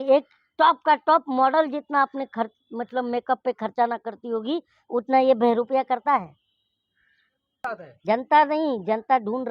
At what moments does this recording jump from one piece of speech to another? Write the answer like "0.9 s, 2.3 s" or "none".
7.6 s